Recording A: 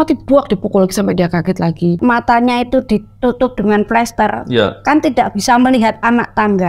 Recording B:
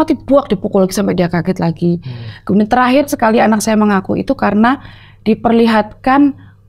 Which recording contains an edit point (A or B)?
A